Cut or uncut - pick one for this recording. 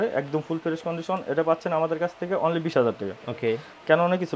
uncut